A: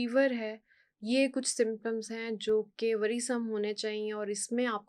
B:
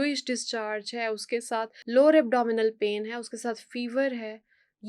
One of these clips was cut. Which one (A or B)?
B